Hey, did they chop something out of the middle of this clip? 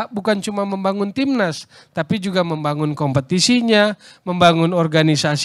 no; 0 cuts

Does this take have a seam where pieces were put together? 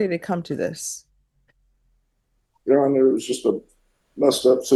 no; 0 cuts

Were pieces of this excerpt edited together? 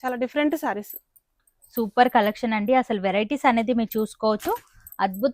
no; 0 cuts

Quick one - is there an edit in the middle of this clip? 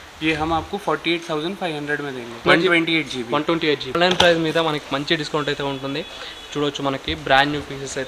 yes; 1 cut; at 3.9 s

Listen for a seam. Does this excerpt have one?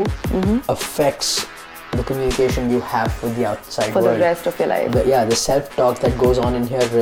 no; 0 cuts

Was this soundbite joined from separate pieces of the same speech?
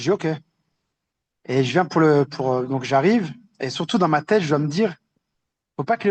no; 0 cuts

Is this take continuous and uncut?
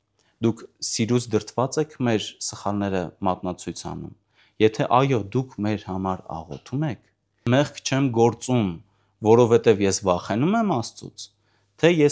no; 1 cut; at 7.4 s

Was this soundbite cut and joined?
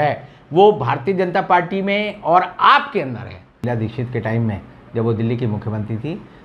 yes; 1 cut; at 3.6 s

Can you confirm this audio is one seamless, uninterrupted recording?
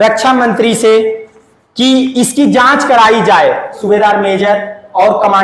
no; 1 cut; at 3.8 s

